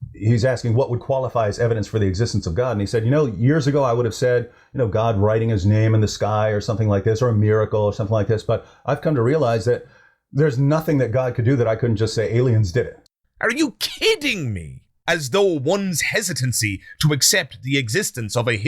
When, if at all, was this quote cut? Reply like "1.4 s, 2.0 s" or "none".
13.1 s